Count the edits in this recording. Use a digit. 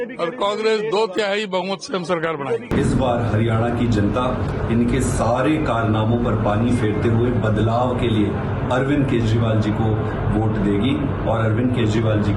1